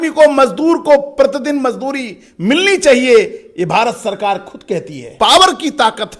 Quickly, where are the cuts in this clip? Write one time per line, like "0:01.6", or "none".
0:05.1